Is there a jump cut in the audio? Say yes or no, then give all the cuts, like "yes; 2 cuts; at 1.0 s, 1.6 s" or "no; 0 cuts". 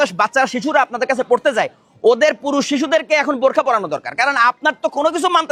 no; 0 cuts